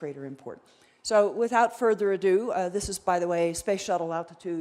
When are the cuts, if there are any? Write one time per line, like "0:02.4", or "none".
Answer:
none

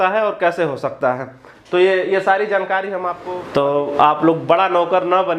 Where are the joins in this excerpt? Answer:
0:03.2

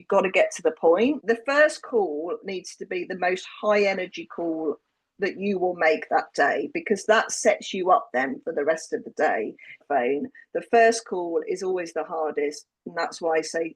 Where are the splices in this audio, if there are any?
0:01.2
0:09.8

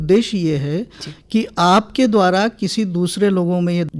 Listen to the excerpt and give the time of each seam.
none

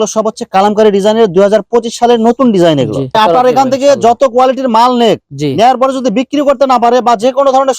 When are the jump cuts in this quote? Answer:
0:03.1

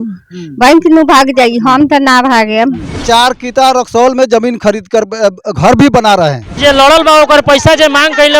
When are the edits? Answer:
0:03.0
0:06.6

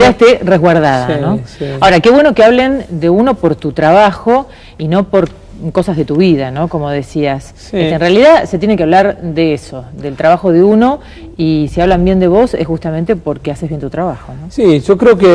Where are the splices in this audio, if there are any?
0:09.4

